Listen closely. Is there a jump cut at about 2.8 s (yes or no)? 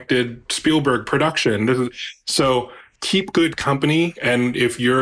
yes